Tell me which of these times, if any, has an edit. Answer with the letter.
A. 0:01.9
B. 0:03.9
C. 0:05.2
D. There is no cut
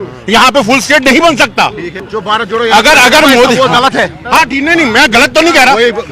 A